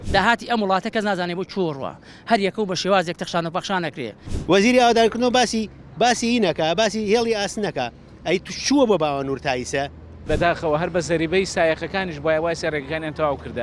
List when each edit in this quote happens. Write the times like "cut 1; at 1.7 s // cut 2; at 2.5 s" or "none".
cut 1; at 4.3 s // cut 2; at 10.2 s